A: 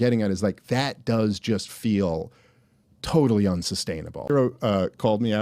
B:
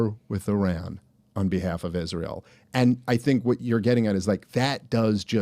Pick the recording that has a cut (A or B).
A